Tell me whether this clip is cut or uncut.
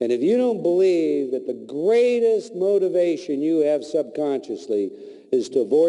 uncut